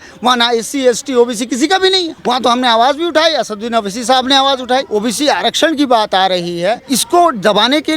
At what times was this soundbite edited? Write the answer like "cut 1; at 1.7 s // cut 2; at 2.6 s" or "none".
cut 1; at 2.1 s // cut 2; at 4.9 s // cut 3; at 6.9 s